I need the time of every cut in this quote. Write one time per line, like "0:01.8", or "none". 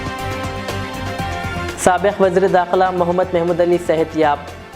0:01.7

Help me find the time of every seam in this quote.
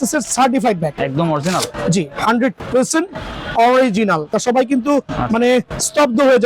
0:00.9
0:04.3

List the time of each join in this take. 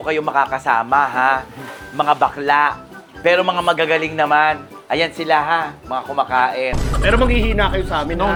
none

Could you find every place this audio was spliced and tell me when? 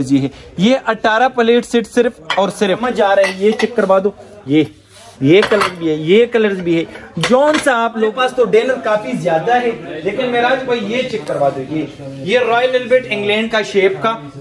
0:02.8
0:08.1

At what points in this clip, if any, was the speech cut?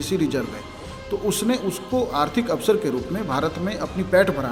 none

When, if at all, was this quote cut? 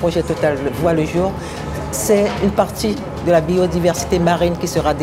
none

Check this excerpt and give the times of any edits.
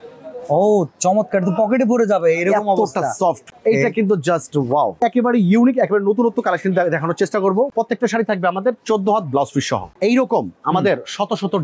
0:03.5
0:05.0
0:07.7
0:09.9

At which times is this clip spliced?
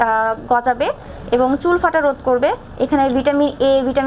none

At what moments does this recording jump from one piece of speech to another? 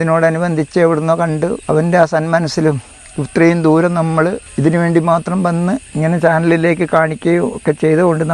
0:01.6
0:04.5
0:05.9

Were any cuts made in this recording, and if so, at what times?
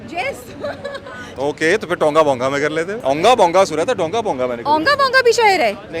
0:01.3
0:02.9

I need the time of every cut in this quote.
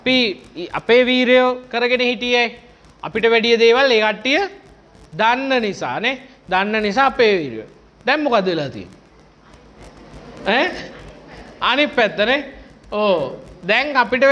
none

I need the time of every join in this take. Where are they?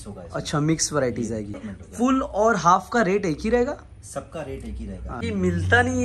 0:01.8
0:05.2

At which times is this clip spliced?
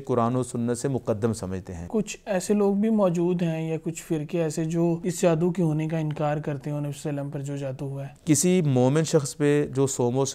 0:01.9
0:05.0
0:08.1

